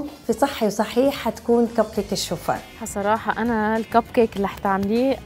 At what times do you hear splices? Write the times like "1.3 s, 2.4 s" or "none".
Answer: 2.9 s